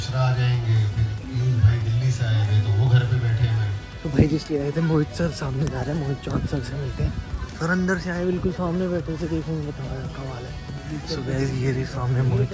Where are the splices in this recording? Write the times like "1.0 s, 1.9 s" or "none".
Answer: none

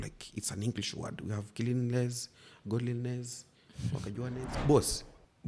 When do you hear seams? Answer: 4.5 s

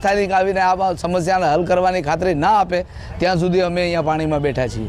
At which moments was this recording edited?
none

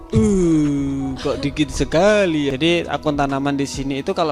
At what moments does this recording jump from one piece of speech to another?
2.5 s

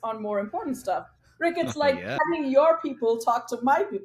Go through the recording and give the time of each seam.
2.2 s

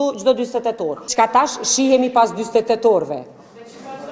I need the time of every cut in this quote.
1.1 s

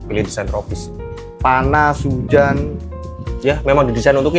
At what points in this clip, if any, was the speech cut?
1.1 s

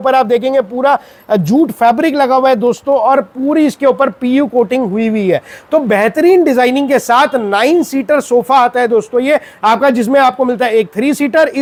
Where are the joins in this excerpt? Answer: none

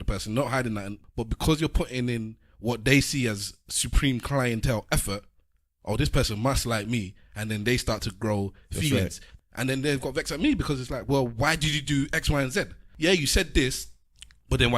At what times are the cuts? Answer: 1.0 s, 9.2 s, 12.8 s

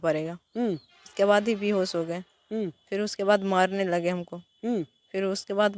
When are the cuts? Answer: none

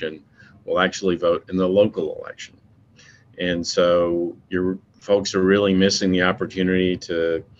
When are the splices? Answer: none

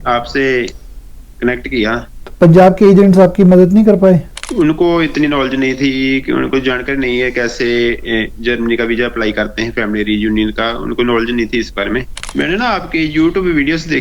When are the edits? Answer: 2.2 s, 4.4 s, 12.2 s

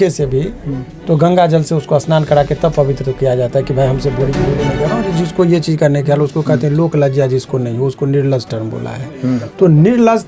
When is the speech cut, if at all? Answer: 4.6 s

